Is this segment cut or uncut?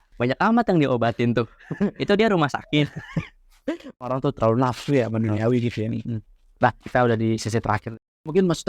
uncut